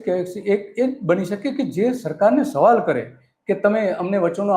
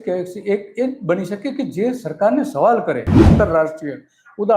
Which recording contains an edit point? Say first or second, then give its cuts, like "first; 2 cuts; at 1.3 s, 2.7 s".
second; 1 cut; at 3.3 s